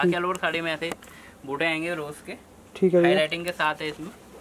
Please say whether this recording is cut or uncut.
uncut